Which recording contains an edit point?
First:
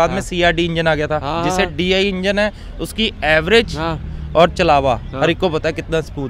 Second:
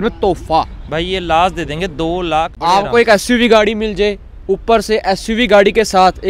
second; 1 cut; at 2.5 s

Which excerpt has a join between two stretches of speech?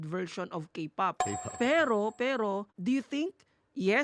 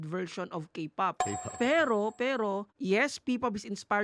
second; 1 cut; at 2.7 s

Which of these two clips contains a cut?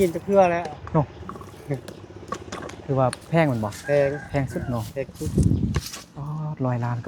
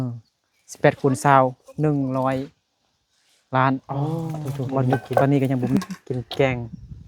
second; 1 cut; at 5.7 s

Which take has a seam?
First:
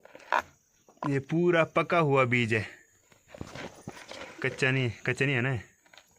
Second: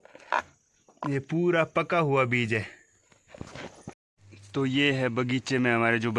second; 1 cut; at 4.0 s

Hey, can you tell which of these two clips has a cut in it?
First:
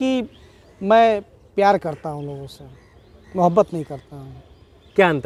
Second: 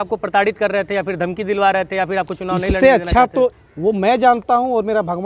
second; 1 cut; at 3.6 s

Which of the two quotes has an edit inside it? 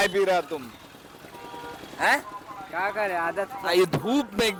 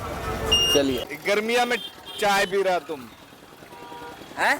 second; 1 cut; at 1.1 s

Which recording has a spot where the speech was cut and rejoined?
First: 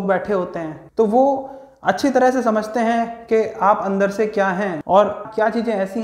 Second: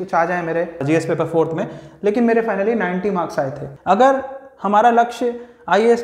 second; 2 cuts; at 0.8 s, 3.6 s

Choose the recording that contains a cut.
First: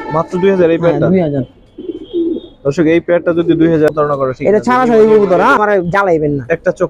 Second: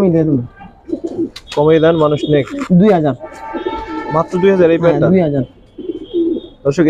first; 2 cuts; at 3.9 s, 5.6 s

